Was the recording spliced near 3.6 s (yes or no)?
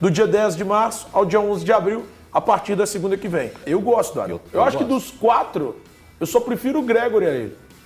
yes